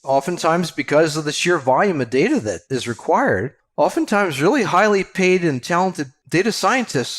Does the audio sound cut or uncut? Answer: cut